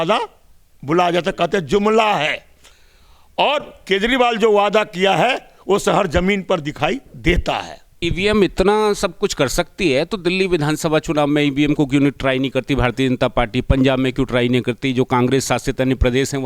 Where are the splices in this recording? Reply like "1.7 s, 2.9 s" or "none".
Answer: 8.0 s